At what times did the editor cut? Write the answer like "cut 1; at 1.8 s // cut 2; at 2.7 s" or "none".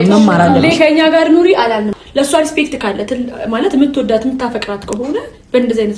cut 1; at 1.9 s